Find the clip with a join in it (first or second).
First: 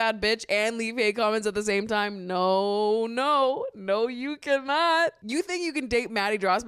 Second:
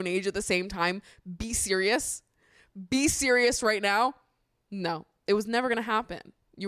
first